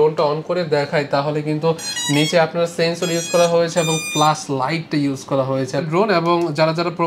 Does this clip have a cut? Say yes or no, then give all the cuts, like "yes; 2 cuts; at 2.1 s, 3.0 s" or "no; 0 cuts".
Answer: yes; 1 cut; at 5.9 s